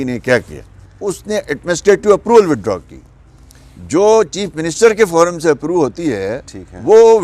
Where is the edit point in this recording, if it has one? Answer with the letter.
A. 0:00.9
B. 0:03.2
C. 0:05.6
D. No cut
A